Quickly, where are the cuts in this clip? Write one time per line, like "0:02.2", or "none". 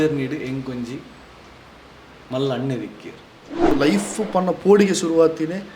0:03.7